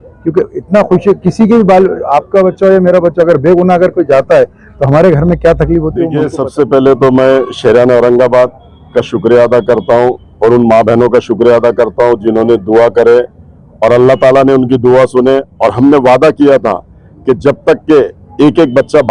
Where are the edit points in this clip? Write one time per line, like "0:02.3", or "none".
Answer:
0:06.2